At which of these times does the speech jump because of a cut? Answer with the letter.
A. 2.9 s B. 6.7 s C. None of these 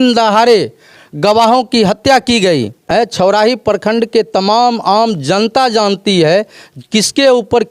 A